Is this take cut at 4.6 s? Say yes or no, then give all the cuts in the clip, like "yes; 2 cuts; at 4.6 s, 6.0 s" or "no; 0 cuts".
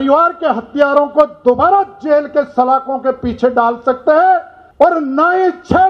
yes; 1 cut; at 4.6 s